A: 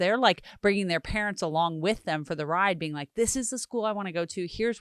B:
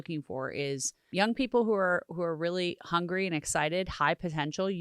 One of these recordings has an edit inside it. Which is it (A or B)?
B